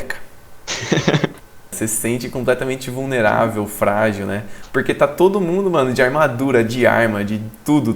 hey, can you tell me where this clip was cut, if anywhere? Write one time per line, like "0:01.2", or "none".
0:01.8

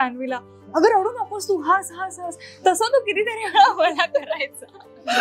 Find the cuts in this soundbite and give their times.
none

